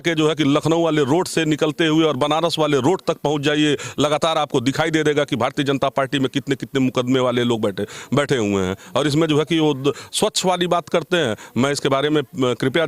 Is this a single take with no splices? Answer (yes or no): yes